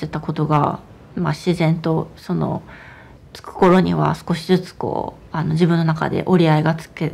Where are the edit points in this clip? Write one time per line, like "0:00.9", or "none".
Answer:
0:03.1